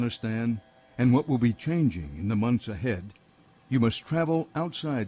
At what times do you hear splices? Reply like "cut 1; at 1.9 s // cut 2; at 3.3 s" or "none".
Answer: cut 1; at 1.3 s